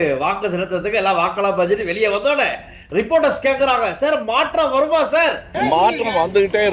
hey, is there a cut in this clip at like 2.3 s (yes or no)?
no